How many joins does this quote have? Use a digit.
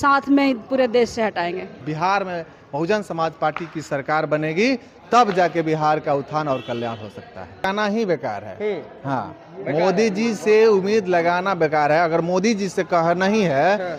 2